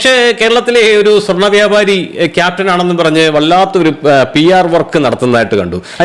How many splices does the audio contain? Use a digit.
0